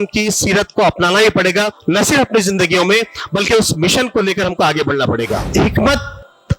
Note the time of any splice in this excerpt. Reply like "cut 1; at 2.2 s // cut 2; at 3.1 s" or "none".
cut 1; at 1.8 s // cut 2; at 5.4 s